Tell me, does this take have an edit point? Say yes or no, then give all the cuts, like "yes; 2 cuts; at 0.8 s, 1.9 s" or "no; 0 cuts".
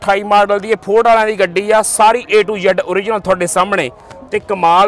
no; 0 cuts